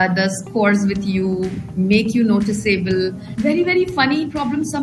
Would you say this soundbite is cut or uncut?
cut